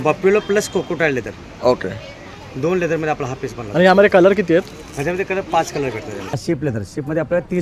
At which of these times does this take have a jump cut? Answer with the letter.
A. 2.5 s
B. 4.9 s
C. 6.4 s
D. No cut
C